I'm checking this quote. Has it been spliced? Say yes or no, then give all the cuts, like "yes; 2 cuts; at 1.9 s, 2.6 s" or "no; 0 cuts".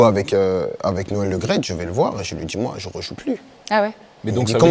no; 0 cuts